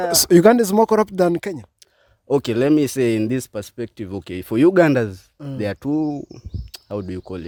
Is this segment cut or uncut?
uncut